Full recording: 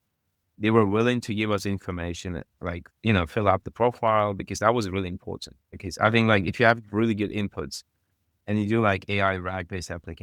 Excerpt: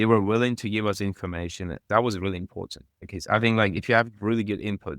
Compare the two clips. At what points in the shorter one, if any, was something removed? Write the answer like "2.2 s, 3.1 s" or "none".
1.8 s

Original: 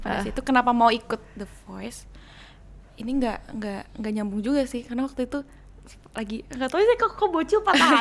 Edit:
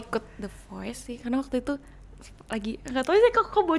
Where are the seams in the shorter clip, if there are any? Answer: 1.1 s

